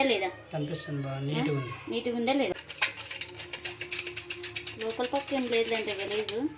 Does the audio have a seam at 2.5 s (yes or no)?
yes